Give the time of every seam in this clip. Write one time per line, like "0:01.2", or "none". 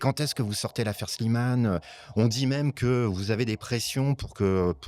none